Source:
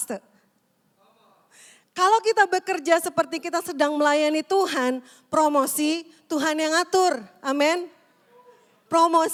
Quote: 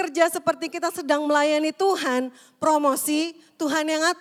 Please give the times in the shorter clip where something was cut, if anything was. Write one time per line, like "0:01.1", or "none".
none

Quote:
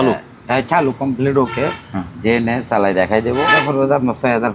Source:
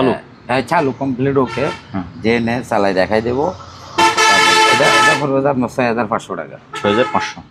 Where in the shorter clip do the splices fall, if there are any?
0:03.5

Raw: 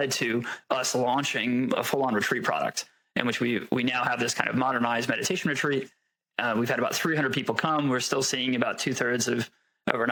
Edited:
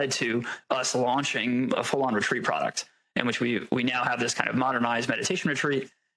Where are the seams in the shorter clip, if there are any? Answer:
none

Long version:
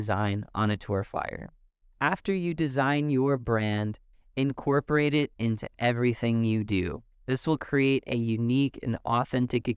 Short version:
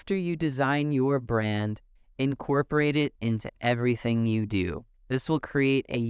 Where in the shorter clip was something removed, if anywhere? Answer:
none

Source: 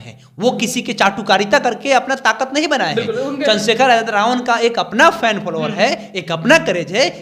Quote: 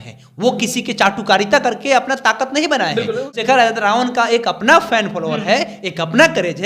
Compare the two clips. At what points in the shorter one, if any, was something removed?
0:03.4

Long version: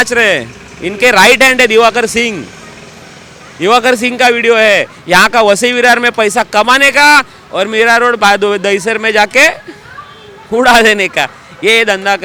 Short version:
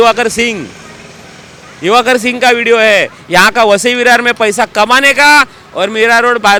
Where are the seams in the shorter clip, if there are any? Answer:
none

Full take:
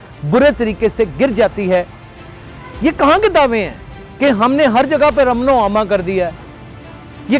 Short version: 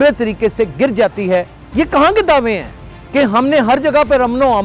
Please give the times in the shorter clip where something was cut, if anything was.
0:01.6

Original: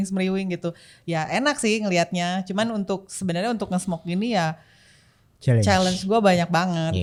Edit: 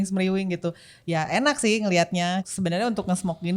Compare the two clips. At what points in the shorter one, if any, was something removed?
0:02.5

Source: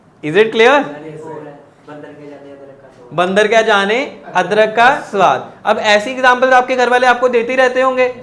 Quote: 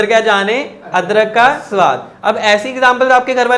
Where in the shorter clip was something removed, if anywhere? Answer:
none

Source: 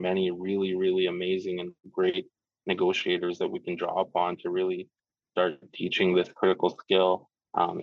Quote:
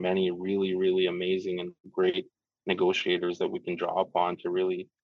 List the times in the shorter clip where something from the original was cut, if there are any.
none

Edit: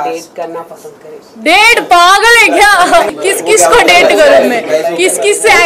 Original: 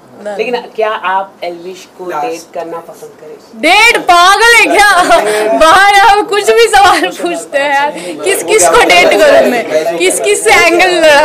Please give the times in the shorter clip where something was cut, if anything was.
0:03.1

